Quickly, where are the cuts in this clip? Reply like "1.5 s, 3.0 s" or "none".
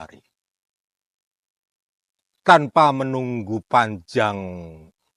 none